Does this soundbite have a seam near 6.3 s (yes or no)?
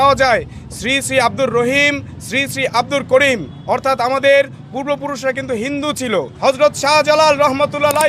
yes